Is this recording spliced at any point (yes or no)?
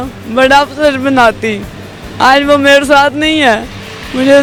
no